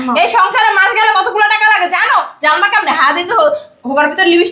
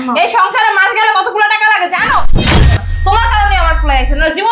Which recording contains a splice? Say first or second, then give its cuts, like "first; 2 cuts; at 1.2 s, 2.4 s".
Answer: second; 1 cut; at 2.6 s